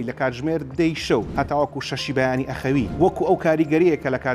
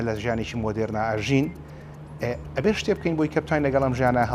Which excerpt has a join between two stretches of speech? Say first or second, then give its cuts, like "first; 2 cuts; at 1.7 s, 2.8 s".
first; 2 cuts; at 1.3 s, 2.9 s